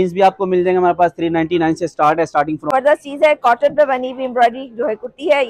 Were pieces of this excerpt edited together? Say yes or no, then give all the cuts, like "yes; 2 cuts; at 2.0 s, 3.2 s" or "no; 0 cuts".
yes; 1 cut; at 2.7 s